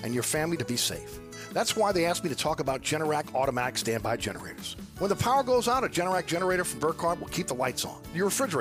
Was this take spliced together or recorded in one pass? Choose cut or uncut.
uncut